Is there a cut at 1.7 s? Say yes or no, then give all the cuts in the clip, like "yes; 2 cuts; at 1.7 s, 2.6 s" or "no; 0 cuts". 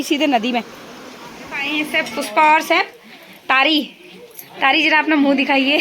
yes; 1 cut; at 1.7 s